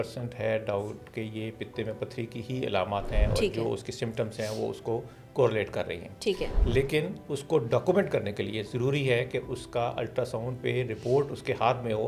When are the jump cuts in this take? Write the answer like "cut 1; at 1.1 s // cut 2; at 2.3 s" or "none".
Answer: none